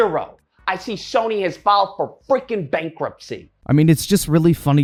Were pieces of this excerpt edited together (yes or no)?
no